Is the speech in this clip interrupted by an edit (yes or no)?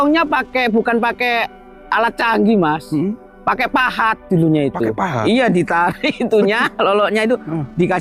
no